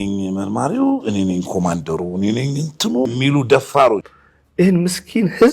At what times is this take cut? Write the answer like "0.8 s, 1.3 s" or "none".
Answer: 3.1 s, 4.1 s